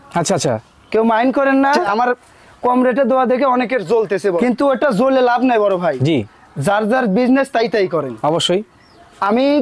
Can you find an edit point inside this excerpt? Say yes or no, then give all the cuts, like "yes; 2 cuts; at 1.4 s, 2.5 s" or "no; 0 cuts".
yes; 2 cuts; at 1.9 s, 4.4 s